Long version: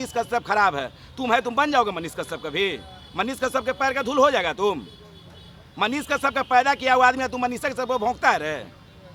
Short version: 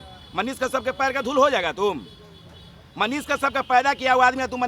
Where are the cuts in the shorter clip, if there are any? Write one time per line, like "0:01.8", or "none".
none